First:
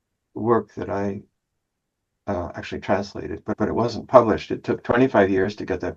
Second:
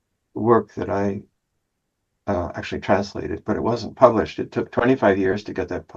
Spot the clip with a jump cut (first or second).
second